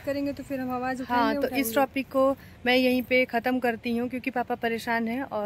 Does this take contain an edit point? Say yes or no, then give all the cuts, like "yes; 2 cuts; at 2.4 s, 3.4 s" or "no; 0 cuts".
no; 0 cuts